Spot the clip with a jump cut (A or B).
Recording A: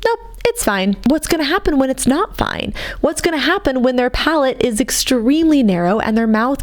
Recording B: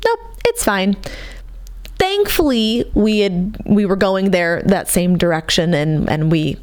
A